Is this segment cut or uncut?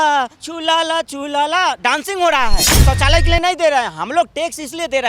cut